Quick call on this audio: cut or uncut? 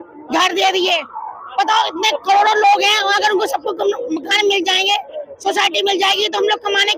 uncut